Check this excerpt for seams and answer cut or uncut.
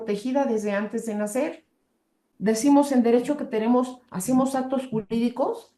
cut